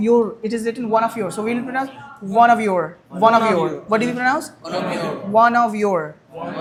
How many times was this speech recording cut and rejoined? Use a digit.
0